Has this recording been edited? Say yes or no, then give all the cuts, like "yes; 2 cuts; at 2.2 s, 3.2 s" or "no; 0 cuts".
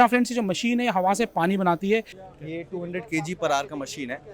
yes; 1 cut; at 2.1 s